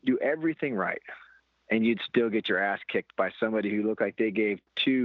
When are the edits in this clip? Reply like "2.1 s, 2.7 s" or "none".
none